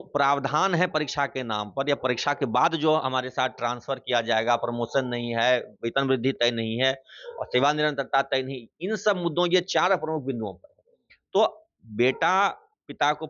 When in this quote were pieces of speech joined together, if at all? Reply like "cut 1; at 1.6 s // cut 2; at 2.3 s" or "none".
none